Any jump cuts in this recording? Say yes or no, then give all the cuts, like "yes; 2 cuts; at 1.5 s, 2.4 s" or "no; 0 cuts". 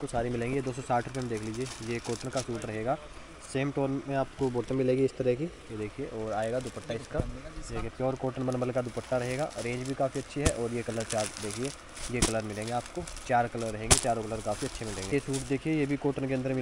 no; 0 cuts